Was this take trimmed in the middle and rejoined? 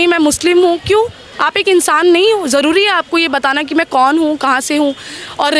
no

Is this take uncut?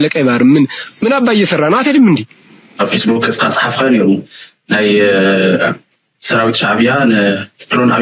no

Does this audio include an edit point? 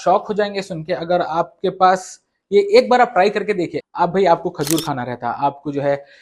yes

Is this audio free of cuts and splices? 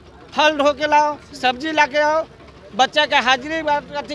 yes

